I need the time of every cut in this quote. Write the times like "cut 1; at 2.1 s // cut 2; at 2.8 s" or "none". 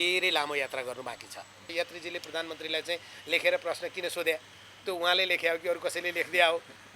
cut 1; at 1.7 s